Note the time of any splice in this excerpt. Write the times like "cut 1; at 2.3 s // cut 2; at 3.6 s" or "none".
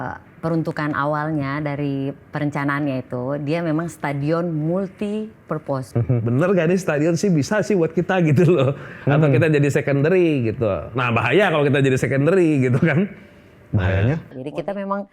cut 1; at 5.9 s // cut 2; at 14.3 s

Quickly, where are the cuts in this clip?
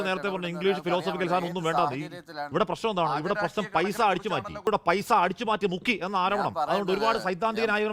cut 1; at 4.6 s

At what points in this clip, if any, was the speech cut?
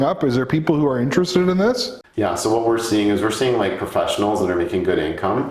cut 1; at 2.0 s

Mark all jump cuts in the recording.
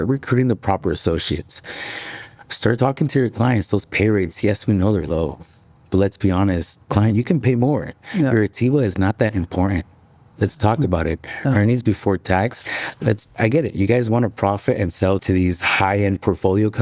cut 1; at 15.2 s

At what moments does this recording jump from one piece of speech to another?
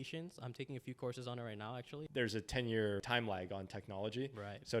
cut 1; at 1.9 s // cut 2; at 3.0 s

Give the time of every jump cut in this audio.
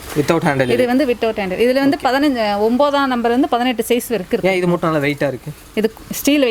none

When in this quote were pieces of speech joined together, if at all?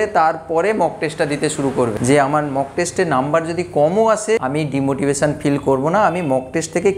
cut 1; at 2.0 s // cut 2; at 4.4 s

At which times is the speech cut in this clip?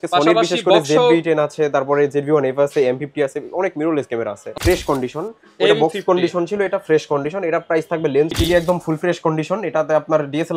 cut 1; at 4.5 s // cut 2; at 8.3 s

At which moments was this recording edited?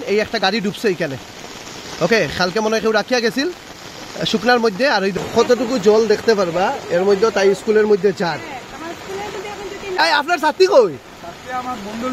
cut 1; at 5.2 s // cut 2; at 9.9 s

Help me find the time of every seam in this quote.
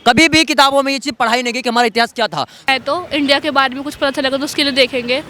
cut 1; at 2.7 s

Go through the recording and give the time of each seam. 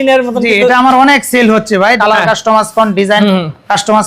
cut 1; at 2.0 s

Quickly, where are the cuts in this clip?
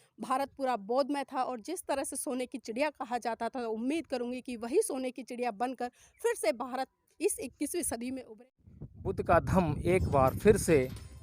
cut 1; at 8.4 s

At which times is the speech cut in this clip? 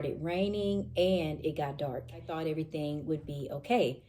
cut 1; at 2.3 s

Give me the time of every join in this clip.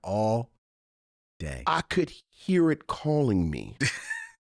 none

